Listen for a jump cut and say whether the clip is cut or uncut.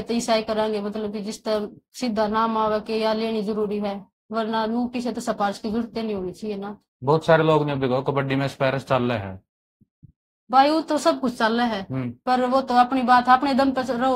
uncut